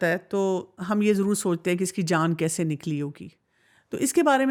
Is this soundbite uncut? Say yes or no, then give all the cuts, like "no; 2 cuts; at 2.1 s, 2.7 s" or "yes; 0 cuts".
yes; 0 cuts